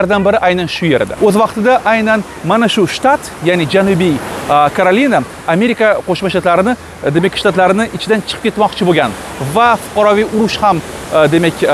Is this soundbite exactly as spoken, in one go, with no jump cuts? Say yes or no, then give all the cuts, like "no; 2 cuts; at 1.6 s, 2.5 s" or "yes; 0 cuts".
yes; 0 cuts